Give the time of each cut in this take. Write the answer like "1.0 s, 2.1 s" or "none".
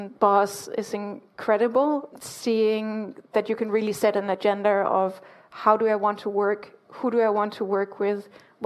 none